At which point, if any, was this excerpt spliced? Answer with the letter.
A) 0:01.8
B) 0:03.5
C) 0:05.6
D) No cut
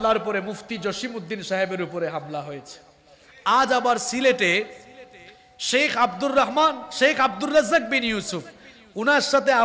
D